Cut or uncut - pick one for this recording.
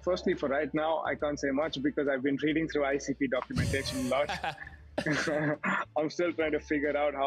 uncut